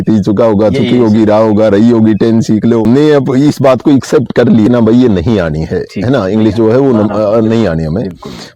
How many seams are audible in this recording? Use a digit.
2